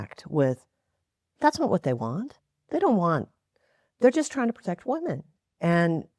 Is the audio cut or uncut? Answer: uncut